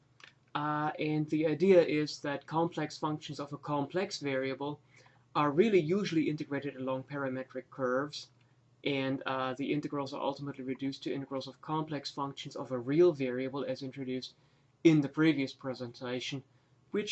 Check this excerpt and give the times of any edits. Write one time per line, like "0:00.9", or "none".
0:15.5